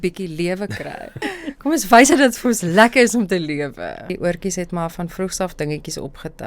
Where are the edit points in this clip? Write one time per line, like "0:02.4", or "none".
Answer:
0:01.2
0:04.1

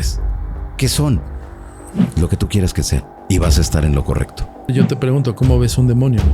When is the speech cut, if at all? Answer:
0:03.1
0:04.7

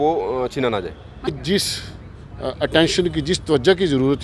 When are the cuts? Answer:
0:01.3

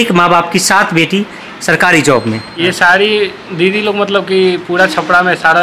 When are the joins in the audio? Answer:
0:02.4

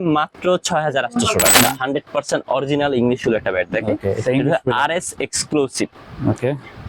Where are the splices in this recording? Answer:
0:01.5

